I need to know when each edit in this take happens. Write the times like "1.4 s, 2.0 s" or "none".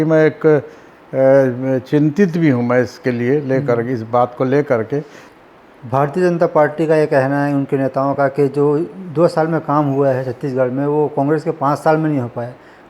5.2 s